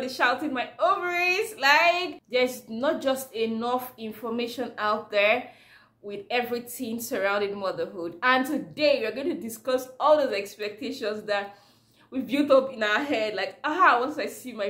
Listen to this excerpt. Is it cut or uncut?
cut